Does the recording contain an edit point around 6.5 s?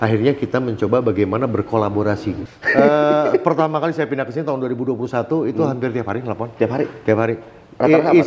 no; 1 cut; at 2.4 s

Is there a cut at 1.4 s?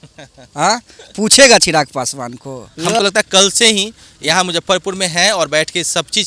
no; 1 cut; at 2.7 s

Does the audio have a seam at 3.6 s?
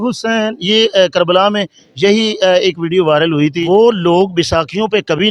yes; 1 cut; at 3.6 s

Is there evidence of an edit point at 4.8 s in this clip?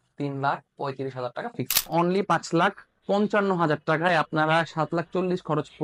no; 1 cut; at 1.9 s

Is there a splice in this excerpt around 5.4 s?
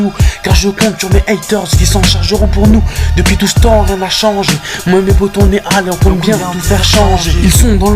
no; 0 cuts

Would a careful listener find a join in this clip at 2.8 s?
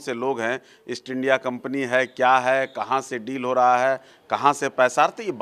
no; 0 cuts

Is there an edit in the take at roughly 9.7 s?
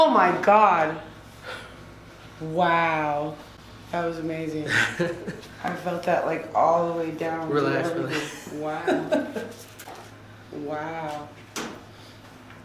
no; 0 cuts

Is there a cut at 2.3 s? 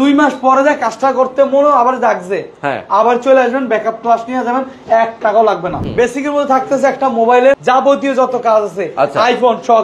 no; 1 cut; at 5.8 s

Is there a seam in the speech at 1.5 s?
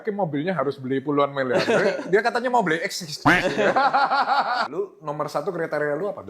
no; 1 cut; at 4.7 s

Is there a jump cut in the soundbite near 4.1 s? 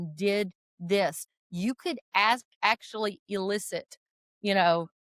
no; 1 cut; at 2.5 s

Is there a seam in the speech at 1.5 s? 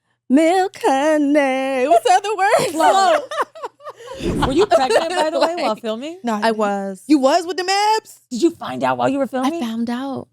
no; 2 cuts; at 4.3 s, 8.2 s

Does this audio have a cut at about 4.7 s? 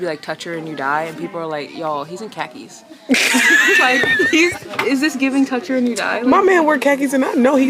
yes; 1 cut; at 4.7 s

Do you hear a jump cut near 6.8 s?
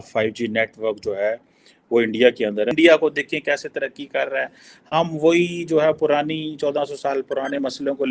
no; 1 cut; at 2.7 s

